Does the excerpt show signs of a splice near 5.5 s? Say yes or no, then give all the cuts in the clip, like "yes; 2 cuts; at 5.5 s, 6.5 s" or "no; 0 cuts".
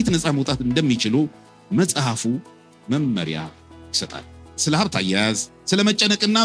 yes; 2 cuts; at 4.6 s, 5.5 s